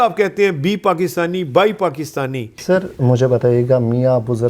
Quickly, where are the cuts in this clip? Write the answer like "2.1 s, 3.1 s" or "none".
2.5 s